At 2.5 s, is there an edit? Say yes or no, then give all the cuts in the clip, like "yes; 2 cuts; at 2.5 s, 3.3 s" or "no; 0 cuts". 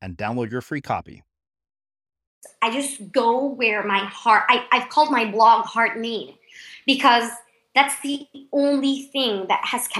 yes; 1 cut; at 2.5 s